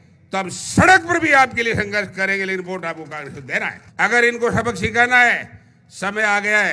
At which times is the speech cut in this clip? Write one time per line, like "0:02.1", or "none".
0:03.8